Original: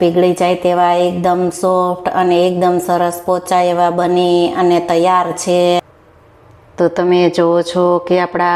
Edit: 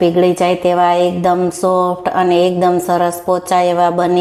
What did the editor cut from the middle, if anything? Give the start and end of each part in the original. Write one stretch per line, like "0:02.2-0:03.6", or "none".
none